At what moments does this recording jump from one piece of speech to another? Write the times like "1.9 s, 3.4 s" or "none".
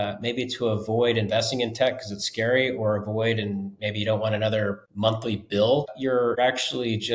4.9 s, 6.3 s